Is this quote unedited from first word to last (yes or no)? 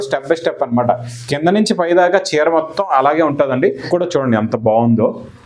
no